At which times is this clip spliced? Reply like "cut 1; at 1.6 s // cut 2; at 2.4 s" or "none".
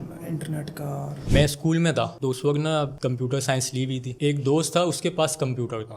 cut 1; at 1.2 s // cut 2; at 4.1 s